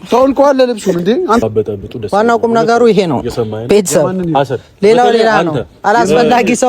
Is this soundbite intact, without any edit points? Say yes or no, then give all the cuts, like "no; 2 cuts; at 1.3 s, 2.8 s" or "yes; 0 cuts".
no; 1 cut; at 1.4 s